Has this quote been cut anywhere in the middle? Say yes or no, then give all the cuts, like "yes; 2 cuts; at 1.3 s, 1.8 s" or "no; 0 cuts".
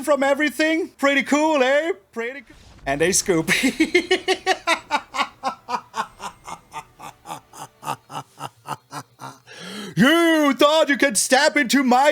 yes; 2 cuts; at 0.9 s, 2.1 s